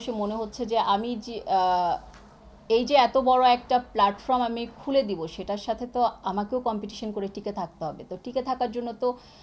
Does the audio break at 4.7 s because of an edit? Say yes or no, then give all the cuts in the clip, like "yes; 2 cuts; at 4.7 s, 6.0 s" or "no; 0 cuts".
no; 0 cuts